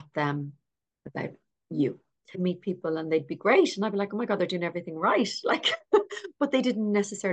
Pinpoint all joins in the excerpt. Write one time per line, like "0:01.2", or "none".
0:02.4